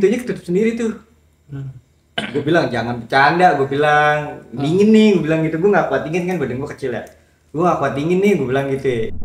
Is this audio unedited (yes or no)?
yes